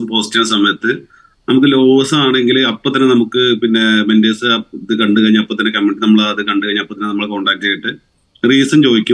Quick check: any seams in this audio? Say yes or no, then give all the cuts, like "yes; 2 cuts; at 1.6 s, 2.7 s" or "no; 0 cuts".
no; 0 cuts